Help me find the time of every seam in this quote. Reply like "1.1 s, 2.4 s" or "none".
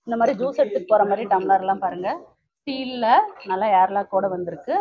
none